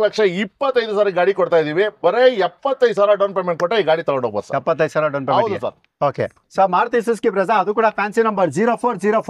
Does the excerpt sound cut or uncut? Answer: uncut